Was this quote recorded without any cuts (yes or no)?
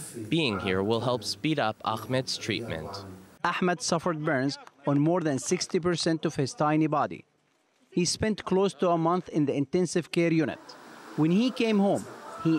yes